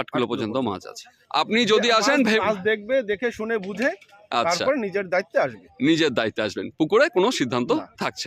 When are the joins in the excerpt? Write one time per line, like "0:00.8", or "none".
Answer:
0:01.2